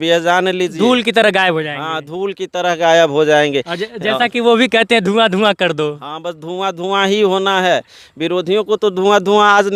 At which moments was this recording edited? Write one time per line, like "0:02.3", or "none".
none